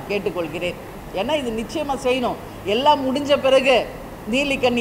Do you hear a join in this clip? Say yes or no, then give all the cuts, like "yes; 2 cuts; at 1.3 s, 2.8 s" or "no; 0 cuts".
yes; 1 cut; at 0.9 s